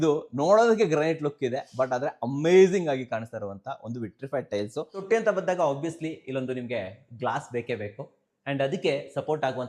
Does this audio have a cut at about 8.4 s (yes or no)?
no